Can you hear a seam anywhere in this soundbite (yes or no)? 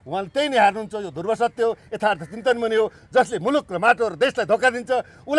no